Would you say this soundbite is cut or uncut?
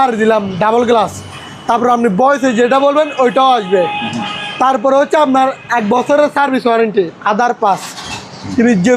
uncut